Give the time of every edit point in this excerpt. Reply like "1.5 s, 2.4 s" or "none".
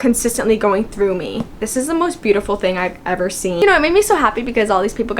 1.6 s, 3.6 s